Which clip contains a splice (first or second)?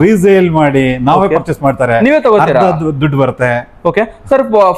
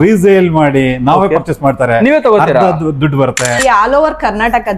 second